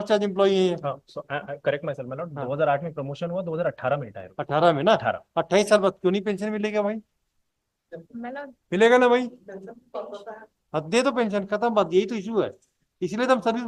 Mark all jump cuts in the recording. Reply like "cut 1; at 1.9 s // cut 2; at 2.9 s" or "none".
none